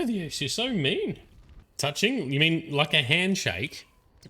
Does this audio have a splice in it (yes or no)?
yes